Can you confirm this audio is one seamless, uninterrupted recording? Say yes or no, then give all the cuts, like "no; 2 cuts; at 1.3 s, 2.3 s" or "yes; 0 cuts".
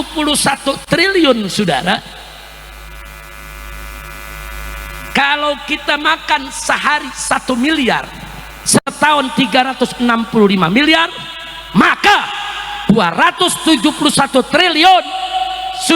yes; 0 cuts